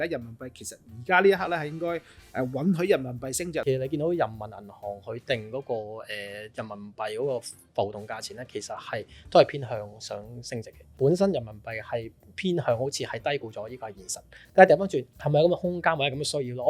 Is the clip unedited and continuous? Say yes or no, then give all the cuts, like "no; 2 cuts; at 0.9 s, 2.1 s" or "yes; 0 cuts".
no; 3 cuts; at 3.6 s, 10.8 s, 15.1 s